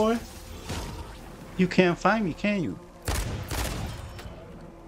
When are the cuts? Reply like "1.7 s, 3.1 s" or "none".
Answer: none

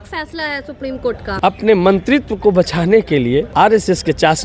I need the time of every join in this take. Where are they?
1.3 s, 3.5 s

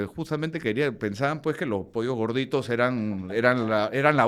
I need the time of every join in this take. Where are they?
none

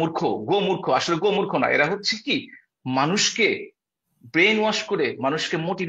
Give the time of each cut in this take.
none

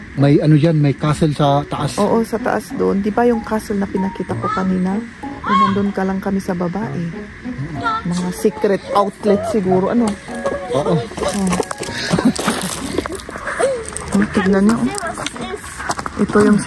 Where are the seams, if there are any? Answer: none

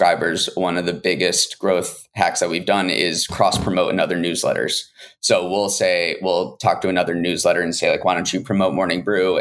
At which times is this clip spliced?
none

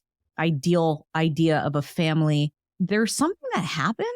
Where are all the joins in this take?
2.6 s

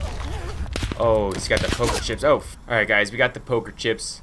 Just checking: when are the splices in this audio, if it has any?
2.5 s

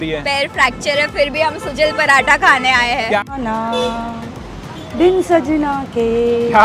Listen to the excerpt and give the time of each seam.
3.2 s

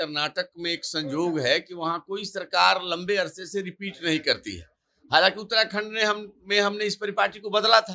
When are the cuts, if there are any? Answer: none

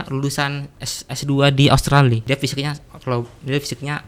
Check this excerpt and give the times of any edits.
2.2 s

